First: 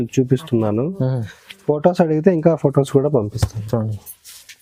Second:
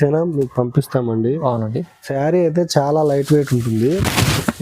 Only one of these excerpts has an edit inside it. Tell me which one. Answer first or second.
second